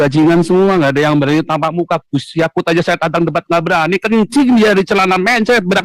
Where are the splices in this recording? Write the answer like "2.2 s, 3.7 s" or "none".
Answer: none

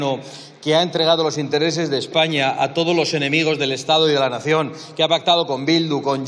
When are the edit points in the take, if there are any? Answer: none

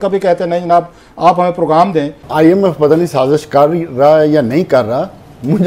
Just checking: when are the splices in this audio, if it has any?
2.2 s

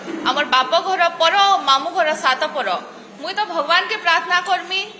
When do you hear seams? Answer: none

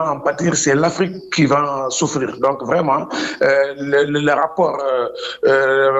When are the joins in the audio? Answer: none

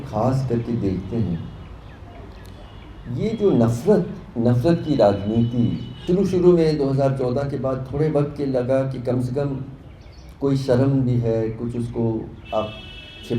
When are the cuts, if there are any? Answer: 5.9 s

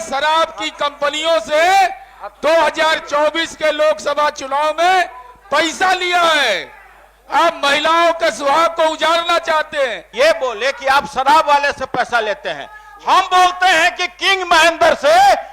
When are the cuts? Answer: 10.0 s

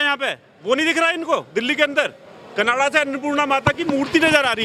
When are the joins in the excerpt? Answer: none

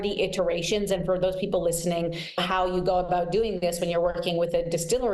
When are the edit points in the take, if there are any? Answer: 2.4 s

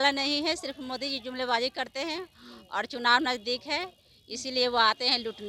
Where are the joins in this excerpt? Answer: none

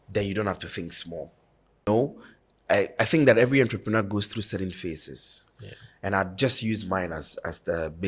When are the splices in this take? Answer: 1.9 s

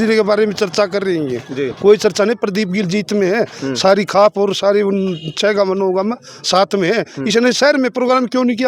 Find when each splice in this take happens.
none

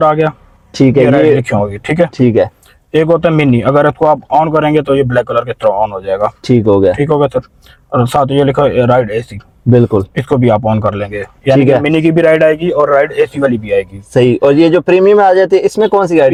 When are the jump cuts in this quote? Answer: none

